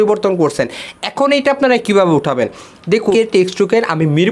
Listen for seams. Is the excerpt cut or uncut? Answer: cut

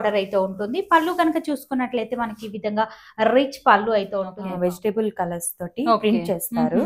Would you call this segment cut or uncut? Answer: cut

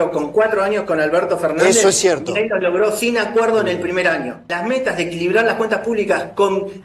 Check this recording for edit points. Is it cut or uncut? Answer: cut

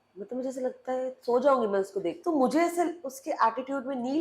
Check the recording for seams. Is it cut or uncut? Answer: cut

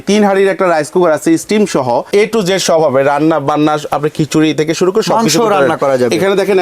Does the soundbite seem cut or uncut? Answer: cut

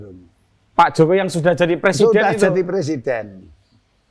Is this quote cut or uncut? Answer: uncut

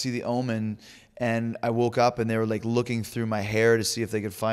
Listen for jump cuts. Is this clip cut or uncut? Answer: uncut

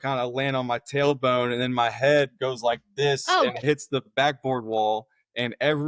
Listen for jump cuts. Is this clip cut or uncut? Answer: cut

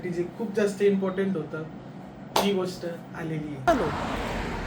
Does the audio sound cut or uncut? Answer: cut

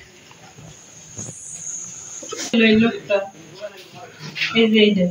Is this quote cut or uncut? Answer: cut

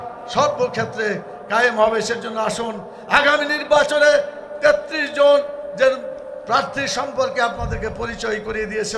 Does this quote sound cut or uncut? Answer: uncut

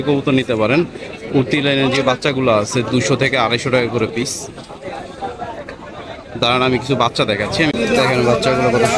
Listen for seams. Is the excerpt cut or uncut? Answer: cut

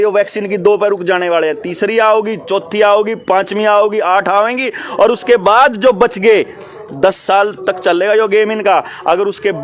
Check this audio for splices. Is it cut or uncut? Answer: uncut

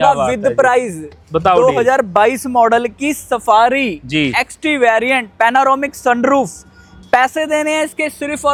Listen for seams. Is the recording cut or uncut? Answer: uncut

